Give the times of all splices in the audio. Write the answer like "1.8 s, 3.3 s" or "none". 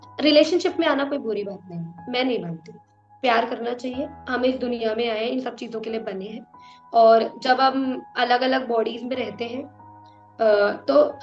none